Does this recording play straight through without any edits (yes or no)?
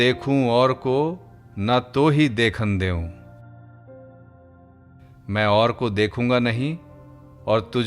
no